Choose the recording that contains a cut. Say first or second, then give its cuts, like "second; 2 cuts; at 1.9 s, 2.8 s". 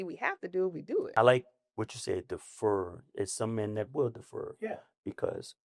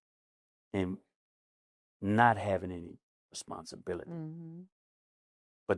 first; 1 cut; at 1.1 s